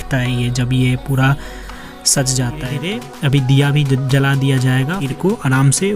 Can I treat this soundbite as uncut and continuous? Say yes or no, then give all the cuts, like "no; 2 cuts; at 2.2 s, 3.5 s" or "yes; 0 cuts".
no; 2 cuts; at 2.9 s, 5.0 s